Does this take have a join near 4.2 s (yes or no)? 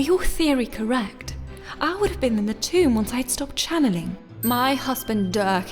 yes